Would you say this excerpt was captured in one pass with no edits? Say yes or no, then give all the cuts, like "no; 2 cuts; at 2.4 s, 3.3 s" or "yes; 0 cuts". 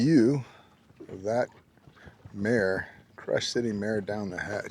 yes; 0 cuts